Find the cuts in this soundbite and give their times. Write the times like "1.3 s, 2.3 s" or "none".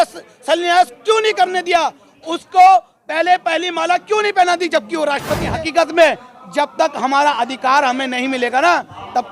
5.6 s